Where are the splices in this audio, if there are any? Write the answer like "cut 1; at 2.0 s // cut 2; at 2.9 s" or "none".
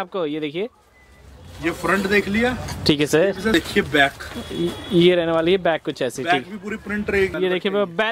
cut 1; at 3.5 s // cut 2; at 7.3 s